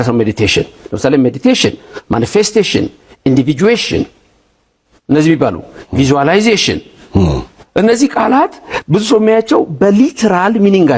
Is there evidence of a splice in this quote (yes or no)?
no